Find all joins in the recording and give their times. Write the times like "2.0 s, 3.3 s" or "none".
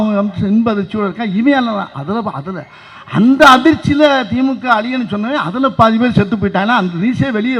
none